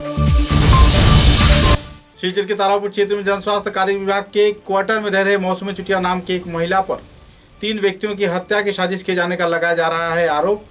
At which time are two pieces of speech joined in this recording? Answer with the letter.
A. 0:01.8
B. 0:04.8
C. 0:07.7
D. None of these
A